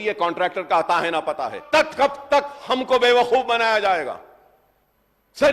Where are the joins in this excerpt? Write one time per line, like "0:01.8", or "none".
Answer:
0:01.6